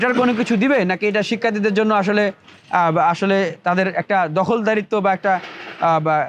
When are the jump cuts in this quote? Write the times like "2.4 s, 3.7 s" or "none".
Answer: none